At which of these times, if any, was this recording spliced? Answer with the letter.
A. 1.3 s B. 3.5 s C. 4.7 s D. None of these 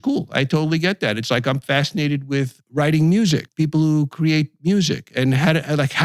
B